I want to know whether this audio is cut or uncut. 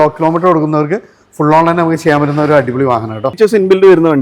cut